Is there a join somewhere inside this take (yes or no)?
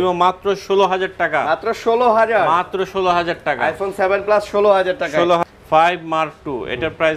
yes